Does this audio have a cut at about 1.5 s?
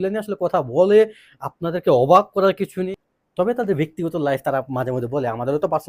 no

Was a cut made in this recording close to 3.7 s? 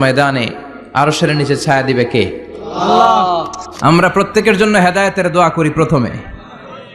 yes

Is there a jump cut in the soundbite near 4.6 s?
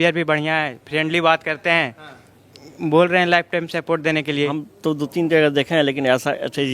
yes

